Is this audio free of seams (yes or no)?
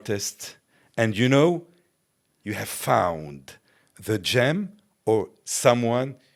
yes